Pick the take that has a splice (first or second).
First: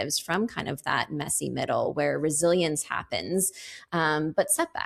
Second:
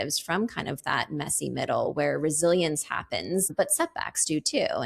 second